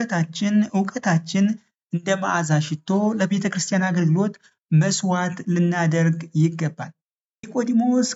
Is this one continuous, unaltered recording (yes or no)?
yes